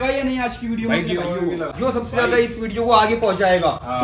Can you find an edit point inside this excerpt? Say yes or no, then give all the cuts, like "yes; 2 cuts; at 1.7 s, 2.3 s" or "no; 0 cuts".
yes; 1 cut; at 1.7 s